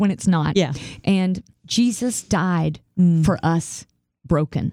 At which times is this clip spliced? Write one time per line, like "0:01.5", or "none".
0:01.5